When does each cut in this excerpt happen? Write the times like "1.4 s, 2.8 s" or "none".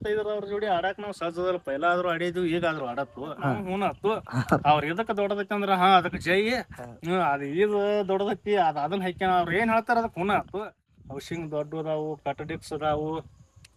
3.6 s, 10.9 s